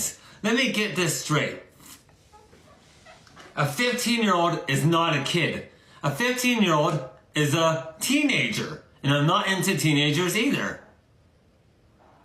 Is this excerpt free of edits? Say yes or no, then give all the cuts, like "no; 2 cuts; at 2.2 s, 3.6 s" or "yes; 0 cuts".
yes; 0 cuts